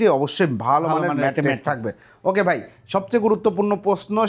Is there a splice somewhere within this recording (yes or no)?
no